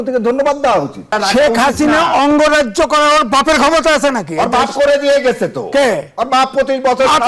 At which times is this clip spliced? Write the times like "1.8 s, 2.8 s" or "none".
1.1 s